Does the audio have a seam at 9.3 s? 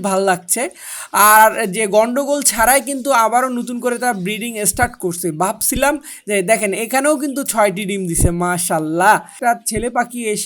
yes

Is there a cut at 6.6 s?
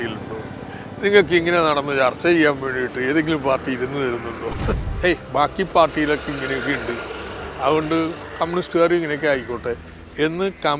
no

